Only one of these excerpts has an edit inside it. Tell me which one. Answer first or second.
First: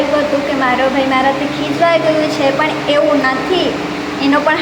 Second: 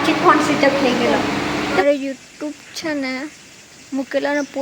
second